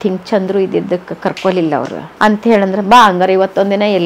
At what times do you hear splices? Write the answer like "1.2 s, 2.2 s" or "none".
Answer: 2.0 s